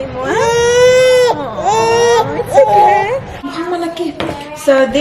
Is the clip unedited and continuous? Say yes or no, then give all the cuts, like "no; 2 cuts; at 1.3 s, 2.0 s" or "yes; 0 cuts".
no; 1 cut; at 3.3 s